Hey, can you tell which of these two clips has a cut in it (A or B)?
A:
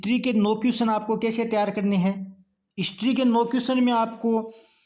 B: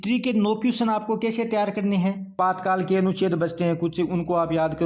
B